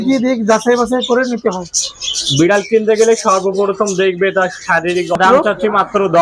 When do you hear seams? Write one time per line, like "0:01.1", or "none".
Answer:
0:05.2